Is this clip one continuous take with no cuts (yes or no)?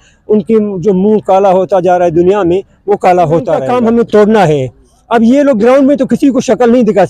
no